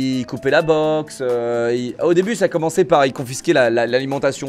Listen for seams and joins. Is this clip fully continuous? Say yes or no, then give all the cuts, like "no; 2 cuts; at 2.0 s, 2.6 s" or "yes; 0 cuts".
yes; 0 cuts